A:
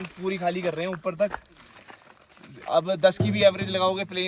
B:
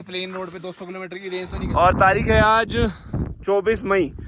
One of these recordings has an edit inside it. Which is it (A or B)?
B